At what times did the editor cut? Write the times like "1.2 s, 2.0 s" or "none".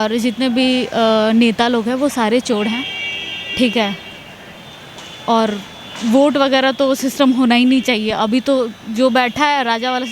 none